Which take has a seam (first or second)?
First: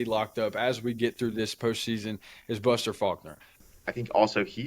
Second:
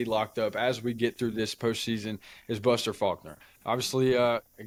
first